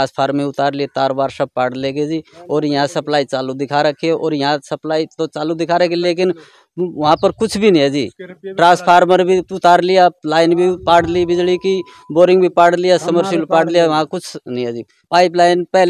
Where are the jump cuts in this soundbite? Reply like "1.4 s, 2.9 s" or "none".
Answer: 15.0 s